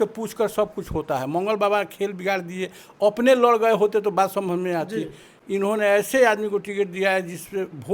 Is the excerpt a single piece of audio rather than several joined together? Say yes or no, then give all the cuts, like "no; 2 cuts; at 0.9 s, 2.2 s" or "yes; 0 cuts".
yes; 0 cuts